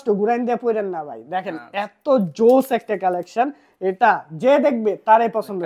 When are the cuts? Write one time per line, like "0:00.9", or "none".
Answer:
none